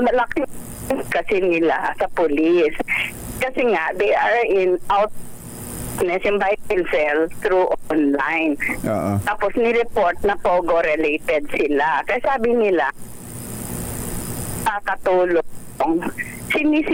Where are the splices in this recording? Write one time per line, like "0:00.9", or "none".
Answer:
none